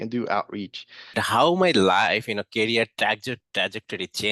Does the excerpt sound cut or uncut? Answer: cut